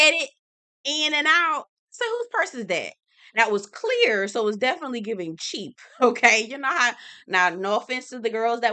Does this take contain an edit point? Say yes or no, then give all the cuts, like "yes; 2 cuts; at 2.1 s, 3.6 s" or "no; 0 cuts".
no; 0 cuts